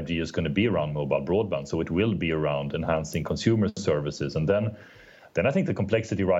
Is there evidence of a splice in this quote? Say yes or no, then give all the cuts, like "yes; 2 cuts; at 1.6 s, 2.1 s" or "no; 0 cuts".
no; 0 cuts